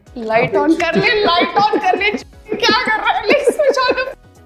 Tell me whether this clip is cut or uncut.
uncut